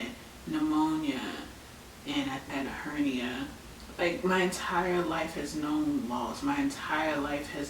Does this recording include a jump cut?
yes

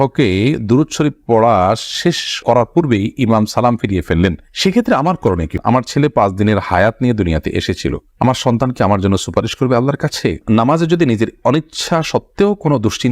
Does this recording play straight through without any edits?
no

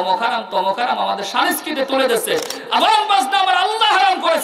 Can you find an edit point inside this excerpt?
no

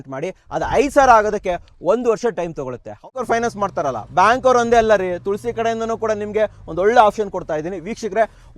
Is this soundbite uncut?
no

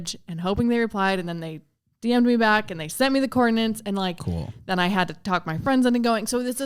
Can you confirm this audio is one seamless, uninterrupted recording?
yes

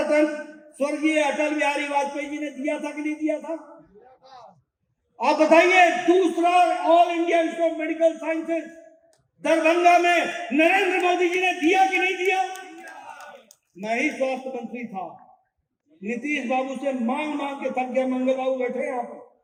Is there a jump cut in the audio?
no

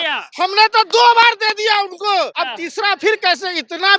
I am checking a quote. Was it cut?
yes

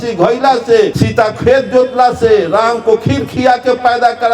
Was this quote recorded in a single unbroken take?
no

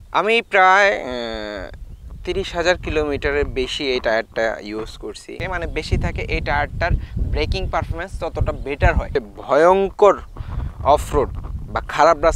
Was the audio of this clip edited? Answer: yes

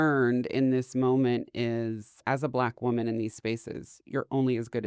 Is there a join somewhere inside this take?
yes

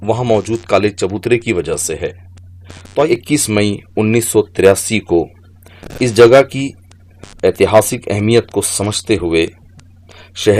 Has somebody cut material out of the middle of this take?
yes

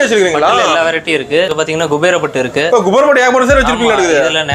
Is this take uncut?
no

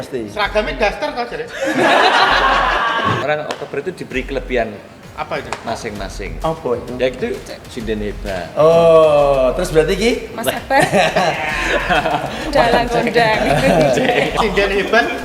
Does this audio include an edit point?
yes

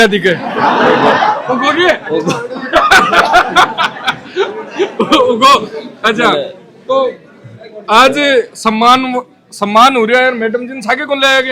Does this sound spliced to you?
no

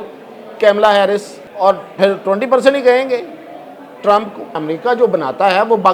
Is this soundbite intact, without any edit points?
no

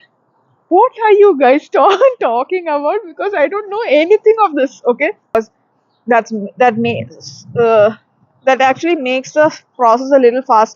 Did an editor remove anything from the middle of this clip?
yes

